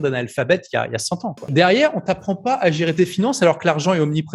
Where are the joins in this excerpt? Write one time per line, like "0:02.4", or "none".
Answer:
0:01.5